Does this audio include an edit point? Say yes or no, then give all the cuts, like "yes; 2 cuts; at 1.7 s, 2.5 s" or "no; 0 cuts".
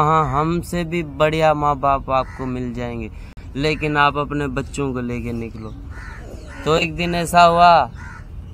no; 0 cuts